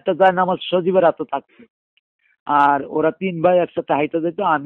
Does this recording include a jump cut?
no; 0 cuts

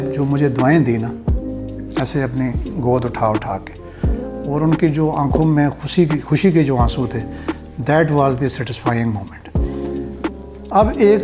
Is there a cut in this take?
no; 0 cuts

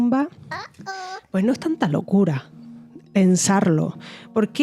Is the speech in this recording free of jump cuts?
yes; 0 cuts

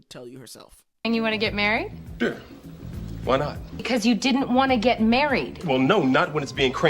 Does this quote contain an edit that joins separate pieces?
yes; 2 cuts; at 1.1 s, 3.8 s

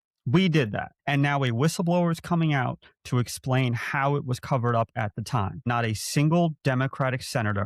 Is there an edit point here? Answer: yes; 2 cuts; at 0.9 s, 5.7 s

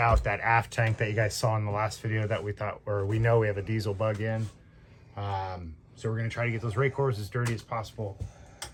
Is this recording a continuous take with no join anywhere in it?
yes; 0 cuts

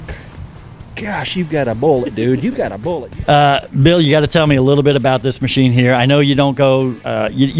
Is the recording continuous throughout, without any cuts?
no; 1 cut; at 2.8 s

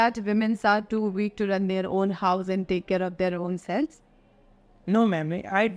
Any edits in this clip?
no; 0 cuts

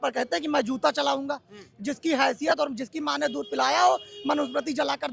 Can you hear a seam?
no; 0 cuts

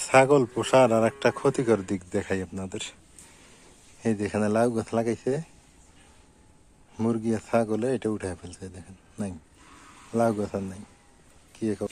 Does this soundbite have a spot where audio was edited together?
no; 0 cuts

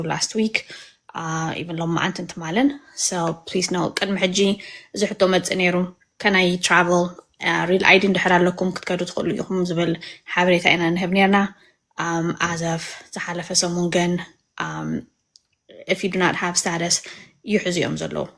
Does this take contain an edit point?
no; 0 cuts

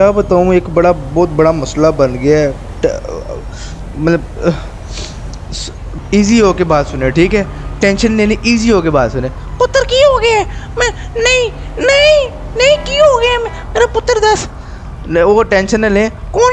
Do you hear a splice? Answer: no; 0 cuts

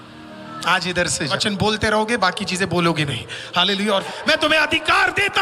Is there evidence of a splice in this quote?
yes; 2 cuts; at 1.4 s, 4.1 s

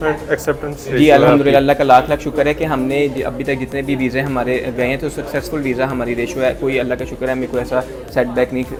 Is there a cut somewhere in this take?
no; 0 cuts

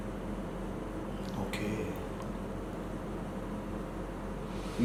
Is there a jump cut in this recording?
no; 0 cuts

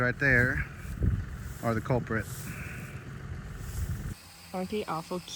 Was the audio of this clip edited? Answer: yes; 1 cut; at 4.1 s

